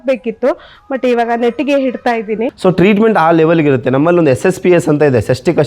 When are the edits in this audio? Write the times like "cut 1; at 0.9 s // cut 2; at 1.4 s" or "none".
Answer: cut 1; at 2.5 s